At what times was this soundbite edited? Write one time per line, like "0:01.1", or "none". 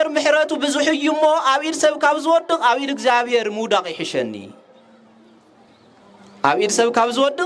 none